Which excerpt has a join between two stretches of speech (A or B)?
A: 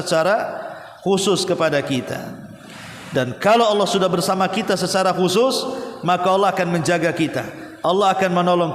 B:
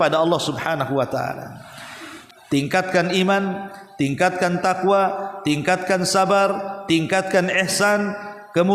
B